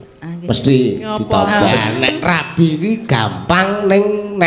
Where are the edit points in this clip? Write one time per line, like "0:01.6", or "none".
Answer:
0:01.6